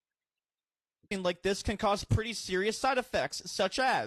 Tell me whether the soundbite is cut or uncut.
uncut